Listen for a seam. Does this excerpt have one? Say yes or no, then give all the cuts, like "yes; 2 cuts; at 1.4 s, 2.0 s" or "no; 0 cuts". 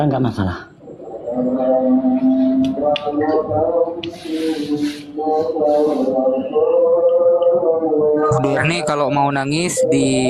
no; 0 cuts